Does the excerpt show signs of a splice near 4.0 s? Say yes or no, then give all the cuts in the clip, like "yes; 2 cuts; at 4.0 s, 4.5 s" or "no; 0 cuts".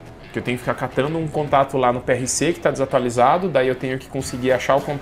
no; 0 cuts